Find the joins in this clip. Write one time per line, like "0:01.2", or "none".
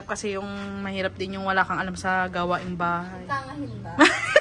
none